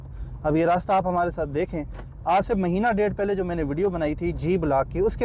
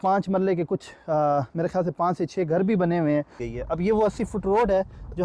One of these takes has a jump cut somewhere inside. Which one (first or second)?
second